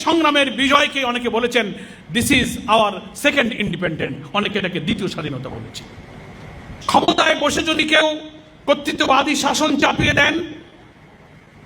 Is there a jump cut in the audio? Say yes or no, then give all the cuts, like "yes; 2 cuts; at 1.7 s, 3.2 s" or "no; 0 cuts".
yes; 1 cut; at 6.8 s